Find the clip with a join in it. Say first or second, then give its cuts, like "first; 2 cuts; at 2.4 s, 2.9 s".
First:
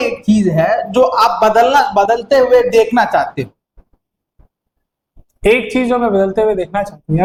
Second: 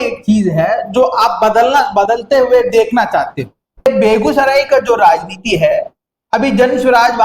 second; 1 cut; at 3.9 s